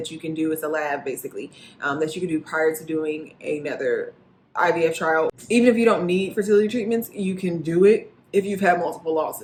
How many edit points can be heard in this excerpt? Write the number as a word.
zero